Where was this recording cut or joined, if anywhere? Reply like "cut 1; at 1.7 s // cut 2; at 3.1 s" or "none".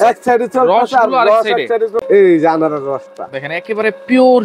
cut 1; at 2.0 s